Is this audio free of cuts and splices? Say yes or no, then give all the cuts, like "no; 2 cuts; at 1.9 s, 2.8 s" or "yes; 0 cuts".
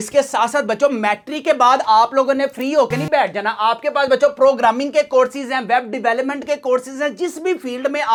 yes; 0 cuts